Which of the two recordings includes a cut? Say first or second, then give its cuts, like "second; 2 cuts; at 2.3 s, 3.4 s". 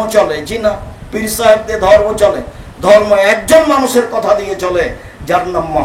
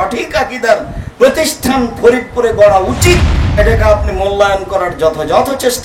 second; 1 cut; at 3.4 s